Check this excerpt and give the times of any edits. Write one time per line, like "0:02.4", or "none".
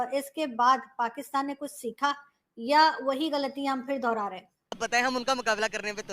0:04.8